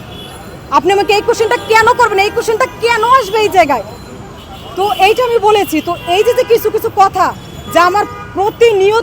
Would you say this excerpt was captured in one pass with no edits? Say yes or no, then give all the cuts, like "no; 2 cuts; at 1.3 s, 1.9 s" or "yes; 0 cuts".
yes; 0 cuts